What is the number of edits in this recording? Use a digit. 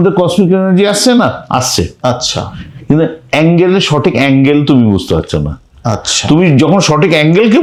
0